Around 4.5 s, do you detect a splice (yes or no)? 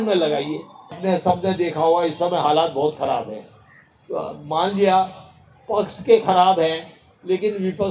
no